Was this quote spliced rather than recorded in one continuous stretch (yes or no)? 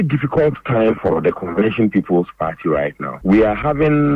no